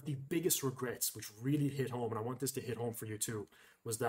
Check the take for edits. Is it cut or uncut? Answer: uncut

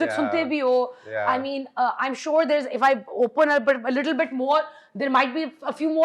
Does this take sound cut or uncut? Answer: uncut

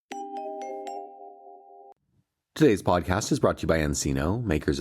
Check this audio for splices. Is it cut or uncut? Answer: cut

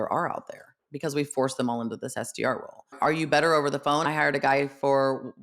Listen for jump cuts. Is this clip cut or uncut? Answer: cut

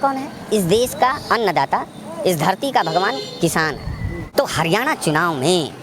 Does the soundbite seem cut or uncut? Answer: cut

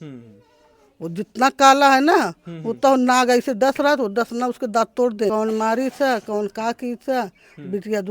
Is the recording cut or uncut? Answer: cut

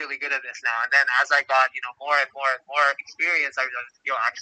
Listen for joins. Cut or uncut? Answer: uncut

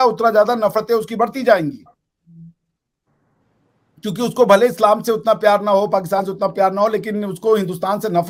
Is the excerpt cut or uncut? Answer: uncut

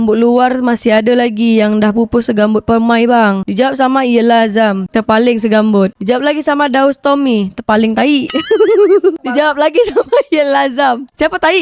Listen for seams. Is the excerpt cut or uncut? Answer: uncut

